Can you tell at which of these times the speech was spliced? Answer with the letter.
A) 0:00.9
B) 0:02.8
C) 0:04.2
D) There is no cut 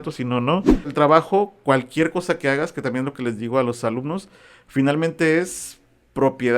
A